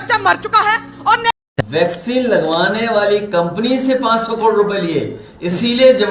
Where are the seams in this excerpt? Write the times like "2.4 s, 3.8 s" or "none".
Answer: 1.5 s